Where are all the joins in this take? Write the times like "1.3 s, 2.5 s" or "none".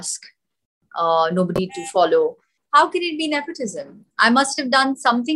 2.5 s